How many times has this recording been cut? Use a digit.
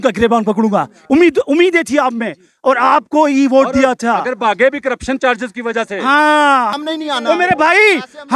2